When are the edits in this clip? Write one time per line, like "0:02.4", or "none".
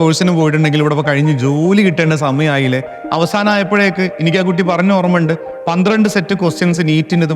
0:03.0